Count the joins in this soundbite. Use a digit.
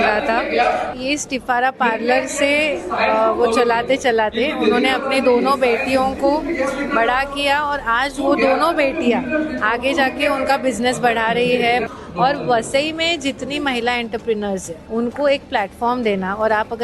3